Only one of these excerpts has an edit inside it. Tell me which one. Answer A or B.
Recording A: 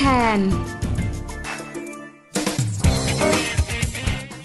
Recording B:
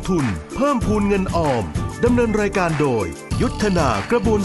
A